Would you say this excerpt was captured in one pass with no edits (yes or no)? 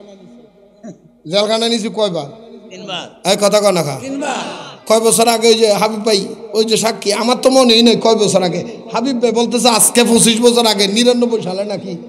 yes